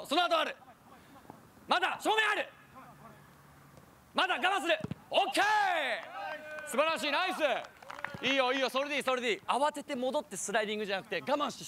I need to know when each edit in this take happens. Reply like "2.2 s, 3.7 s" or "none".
9.4 s